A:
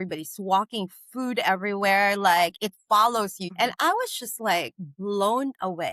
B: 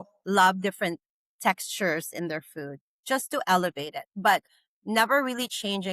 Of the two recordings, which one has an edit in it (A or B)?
A